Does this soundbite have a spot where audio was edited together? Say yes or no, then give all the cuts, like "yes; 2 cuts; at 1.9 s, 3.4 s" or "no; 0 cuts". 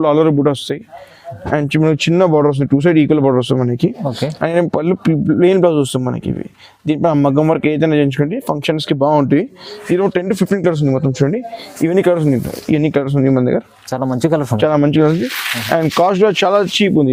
no; 0 cuts